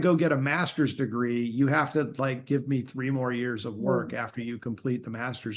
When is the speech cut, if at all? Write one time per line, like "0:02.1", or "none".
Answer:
none